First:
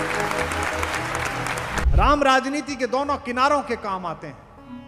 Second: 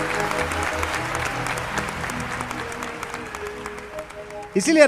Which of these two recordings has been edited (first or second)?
first